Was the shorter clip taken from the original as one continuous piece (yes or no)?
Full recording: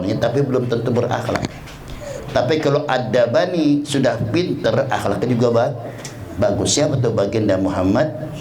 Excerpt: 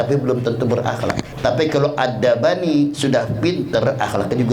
no